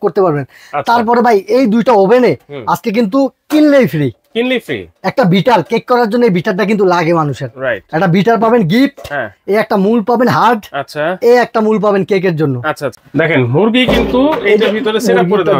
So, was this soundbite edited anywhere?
yes; 1 cut; at 12.9 s

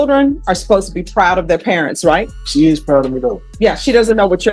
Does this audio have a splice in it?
yes; 2 cuts; at 2.4 s, 3.4 s

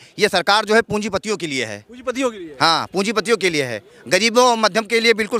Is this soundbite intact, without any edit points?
yes; 0 cuts

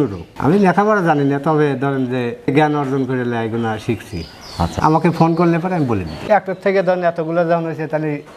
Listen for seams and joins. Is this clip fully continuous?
no; 1 cut; at 6.1 s

